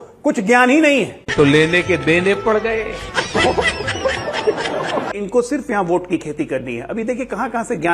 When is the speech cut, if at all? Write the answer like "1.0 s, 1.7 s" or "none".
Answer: 5.1 s